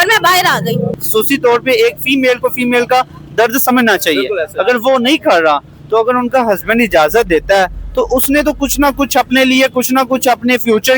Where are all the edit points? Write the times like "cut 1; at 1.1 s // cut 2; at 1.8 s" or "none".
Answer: cut 1; at 1.0 s